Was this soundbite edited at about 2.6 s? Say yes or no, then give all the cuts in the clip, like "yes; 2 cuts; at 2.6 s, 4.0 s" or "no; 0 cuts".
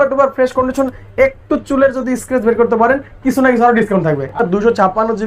no; 1 cut; at 4.3 s